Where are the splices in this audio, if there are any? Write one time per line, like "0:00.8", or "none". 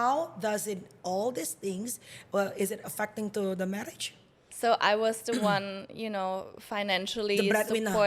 0:04.4

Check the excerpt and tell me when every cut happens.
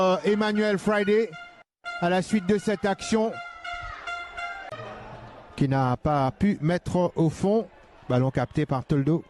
0:04.8

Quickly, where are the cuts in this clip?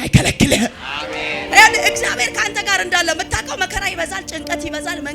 0:01.5

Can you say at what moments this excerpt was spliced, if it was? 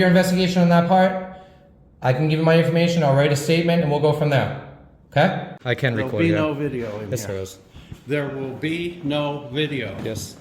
0:05.5

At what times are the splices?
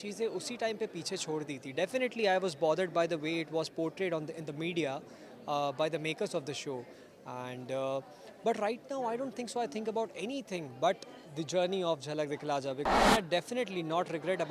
0:12.9

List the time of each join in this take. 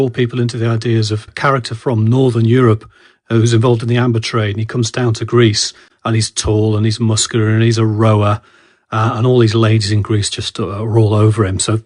none

